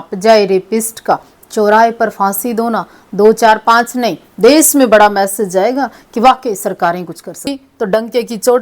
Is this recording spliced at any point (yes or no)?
yes